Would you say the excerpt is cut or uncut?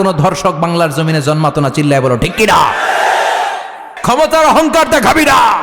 cut